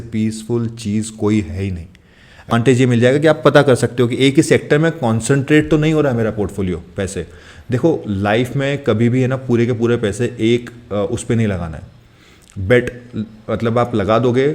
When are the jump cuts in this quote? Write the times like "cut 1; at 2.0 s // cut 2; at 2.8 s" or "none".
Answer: cut 1; at 2.5 s